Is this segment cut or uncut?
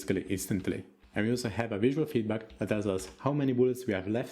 cut